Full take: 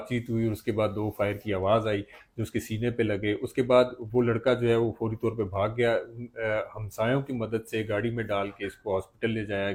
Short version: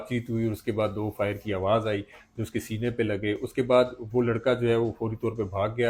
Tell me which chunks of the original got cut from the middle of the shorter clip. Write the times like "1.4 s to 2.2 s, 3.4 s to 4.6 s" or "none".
none